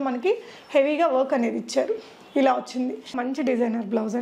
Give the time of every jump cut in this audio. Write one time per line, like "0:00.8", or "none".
0:03.2